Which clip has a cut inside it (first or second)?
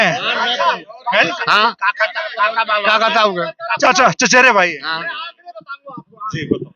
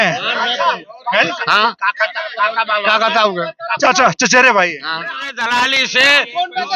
second